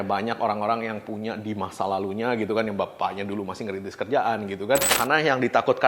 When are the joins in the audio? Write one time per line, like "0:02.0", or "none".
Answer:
0:05.0